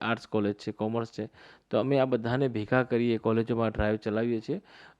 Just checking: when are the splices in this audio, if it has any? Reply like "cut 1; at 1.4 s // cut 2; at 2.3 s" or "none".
none